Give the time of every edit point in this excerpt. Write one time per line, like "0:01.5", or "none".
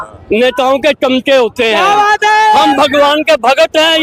none

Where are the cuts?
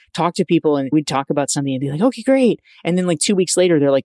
0:00.9

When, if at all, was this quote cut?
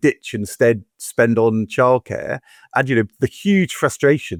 none

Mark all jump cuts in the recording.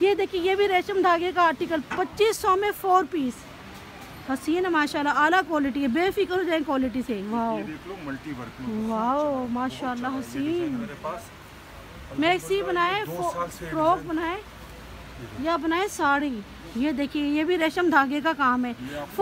none

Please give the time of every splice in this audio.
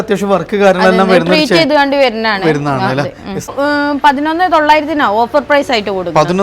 0:03.5

